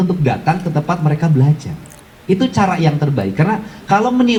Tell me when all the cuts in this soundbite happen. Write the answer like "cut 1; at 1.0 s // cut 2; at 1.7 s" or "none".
none